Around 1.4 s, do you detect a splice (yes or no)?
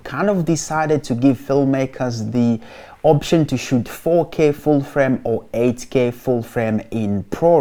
no